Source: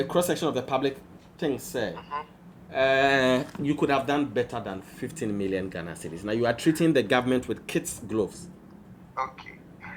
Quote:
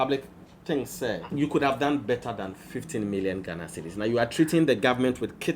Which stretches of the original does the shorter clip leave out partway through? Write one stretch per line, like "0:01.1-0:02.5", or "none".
0:02.0-0:03.5